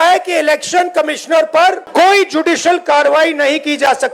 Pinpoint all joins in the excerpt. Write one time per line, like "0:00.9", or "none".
0:01.8